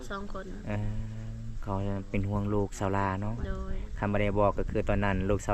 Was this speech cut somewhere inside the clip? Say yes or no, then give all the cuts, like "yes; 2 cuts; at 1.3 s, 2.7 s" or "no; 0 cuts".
no; 0 cuts